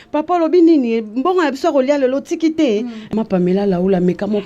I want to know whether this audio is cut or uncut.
cut